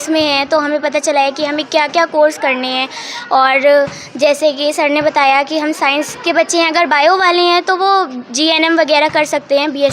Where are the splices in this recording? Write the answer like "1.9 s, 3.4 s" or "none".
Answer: none